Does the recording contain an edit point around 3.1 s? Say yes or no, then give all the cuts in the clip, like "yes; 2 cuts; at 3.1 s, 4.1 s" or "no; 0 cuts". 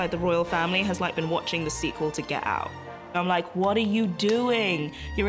yes; 1 cut; at 3.1 s